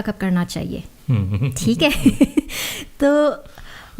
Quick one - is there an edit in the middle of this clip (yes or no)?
no